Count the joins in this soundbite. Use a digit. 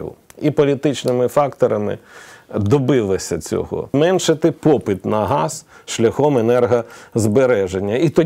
1